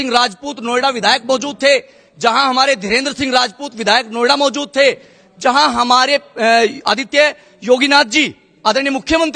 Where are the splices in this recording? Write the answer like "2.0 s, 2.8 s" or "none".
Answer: none